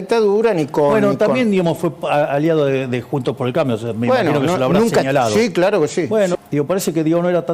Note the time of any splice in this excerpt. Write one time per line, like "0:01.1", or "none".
0:06.3